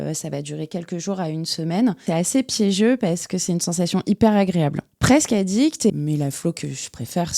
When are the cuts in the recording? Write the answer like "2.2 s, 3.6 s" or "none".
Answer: 2.0 s, 4.9 s, 5.9 s